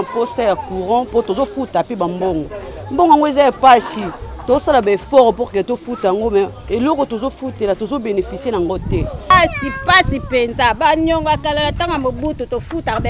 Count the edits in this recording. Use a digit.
1